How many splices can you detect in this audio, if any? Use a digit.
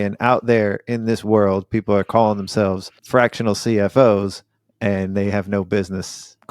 1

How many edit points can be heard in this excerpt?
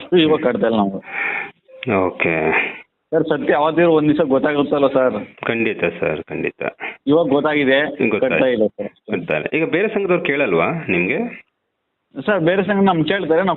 0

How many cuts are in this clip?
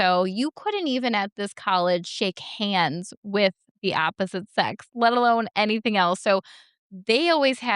0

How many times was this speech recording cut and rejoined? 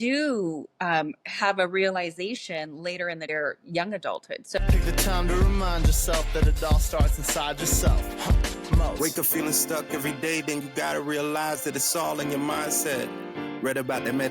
2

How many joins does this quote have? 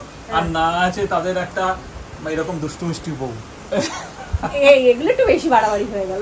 0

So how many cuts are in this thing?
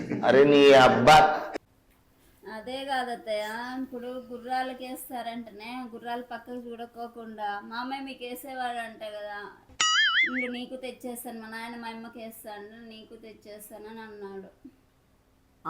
1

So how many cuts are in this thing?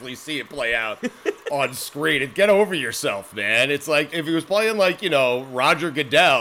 1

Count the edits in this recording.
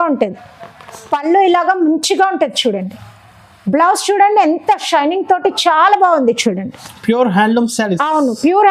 0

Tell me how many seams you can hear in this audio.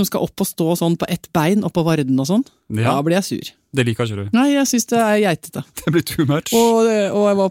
0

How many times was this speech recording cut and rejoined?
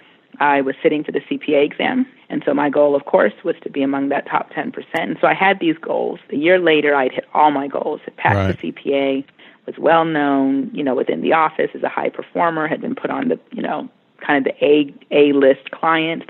2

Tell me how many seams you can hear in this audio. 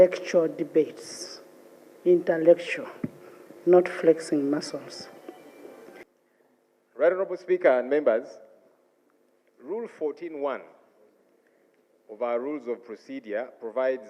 1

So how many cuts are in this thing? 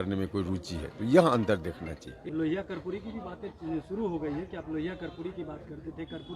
1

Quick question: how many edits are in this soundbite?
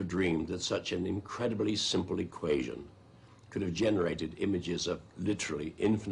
1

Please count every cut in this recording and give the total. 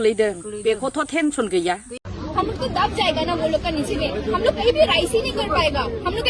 1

